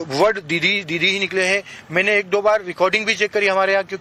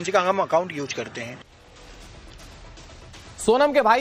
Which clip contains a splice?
second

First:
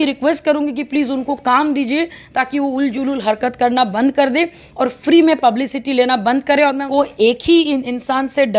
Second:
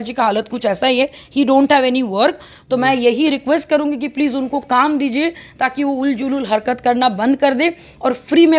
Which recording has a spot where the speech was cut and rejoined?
first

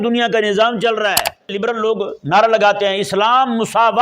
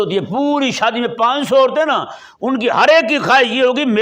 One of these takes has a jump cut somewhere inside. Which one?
first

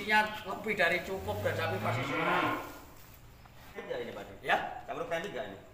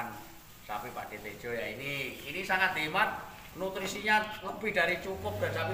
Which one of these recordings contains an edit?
first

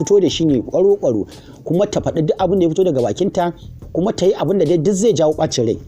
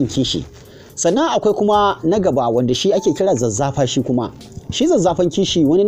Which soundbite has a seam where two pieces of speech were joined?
first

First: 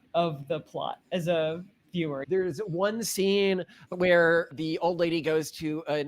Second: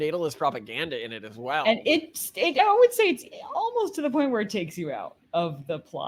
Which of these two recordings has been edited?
first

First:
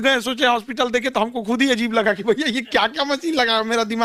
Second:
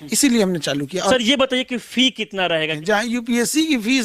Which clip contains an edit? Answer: second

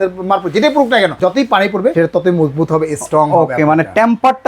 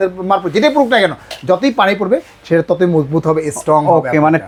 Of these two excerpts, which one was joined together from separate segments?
first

